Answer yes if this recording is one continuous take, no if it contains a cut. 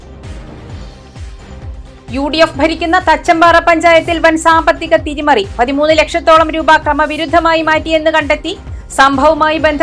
yes